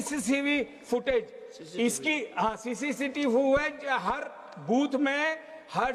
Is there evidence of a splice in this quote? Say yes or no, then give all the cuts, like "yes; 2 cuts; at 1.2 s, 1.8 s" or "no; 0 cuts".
no; 0 cuts